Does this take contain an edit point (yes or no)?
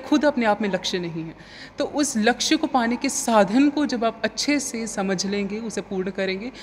no